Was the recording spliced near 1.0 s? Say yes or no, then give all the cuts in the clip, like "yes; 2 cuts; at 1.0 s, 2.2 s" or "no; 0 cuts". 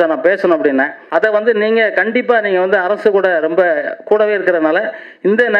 yes; 1 cut; at 1.0 s